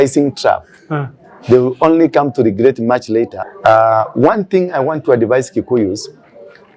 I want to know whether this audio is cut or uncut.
cut